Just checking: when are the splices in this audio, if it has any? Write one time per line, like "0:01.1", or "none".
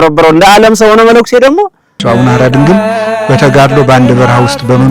0:02.0

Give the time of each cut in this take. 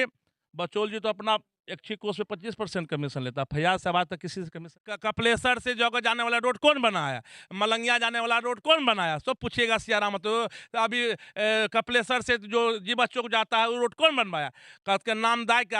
0:04.7

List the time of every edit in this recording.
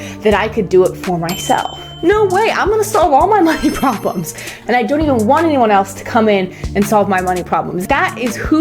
0:01.8
0:04.5
0:07.8

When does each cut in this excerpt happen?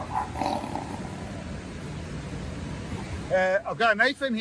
0:02.9

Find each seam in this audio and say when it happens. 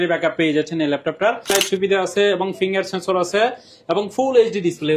0:01.5

